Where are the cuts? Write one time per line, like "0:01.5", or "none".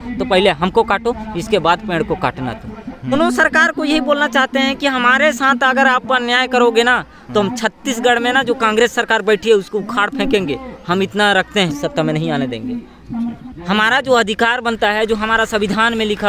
0:03.1
0:11.7
0:13.3